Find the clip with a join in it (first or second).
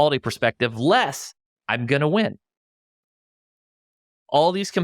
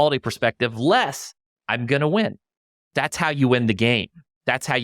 second